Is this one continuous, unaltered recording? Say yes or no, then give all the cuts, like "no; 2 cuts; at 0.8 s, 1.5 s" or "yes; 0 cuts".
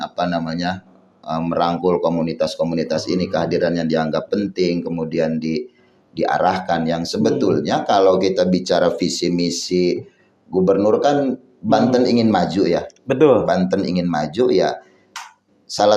yes; 0 cuts